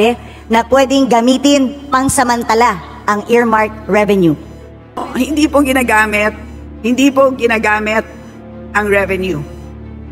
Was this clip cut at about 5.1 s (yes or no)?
yes